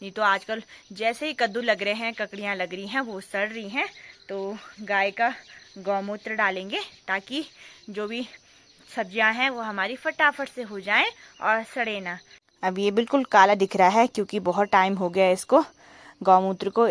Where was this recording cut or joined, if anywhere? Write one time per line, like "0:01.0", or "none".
none